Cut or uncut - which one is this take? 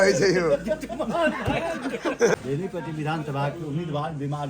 cut